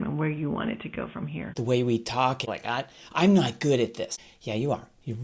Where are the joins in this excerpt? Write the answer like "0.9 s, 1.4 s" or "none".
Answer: 1.6 s, 2.5 s, 4.2 s